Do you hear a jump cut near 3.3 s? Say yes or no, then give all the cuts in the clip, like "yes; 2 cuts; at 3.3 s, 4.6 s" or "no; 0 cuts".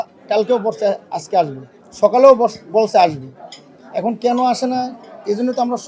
no; 0 cuts